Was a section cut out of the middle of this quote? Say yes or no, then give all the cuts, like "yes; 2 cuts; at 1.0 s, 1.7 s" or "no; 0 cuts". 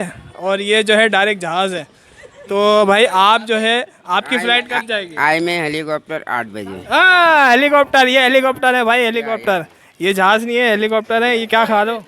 yes; 2 cuts; at 2.2 s, 7.0 s